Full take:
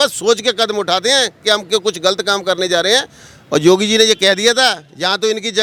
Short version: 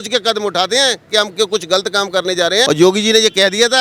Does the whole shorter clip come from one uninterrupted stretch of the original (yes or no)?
no